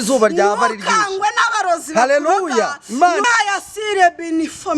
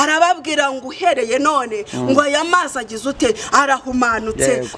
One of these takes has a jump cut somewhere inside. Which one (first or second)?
first